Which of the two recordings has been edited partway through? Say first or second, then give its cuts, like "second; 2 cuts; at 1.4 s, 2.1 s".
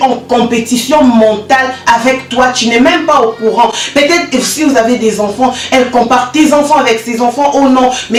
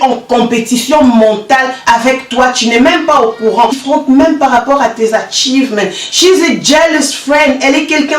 second; 1 cut; at 3.8 s